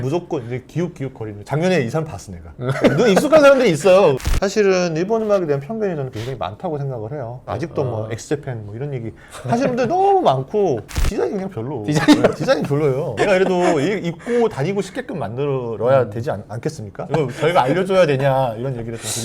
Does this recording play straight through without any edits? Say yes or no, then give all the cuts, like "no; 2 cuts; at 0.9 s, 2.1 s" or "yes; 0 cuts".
no; 5 cuts; at 1.4 s, 4.2 s, 7.5 s, 10.9 s, 17.0 s